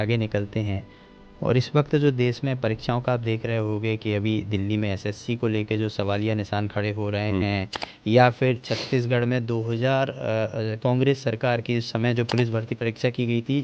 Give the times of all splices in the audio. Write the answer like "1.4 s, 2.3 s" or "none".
none